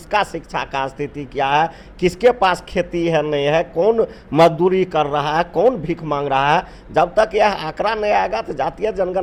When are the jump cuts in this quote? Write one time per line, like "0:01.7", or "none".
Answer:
none